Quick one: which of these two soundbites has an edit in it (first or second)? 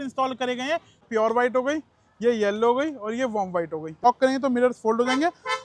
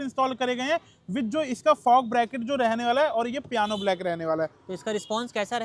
first